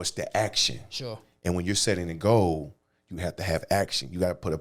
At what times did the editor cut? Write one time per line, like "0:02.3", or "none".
none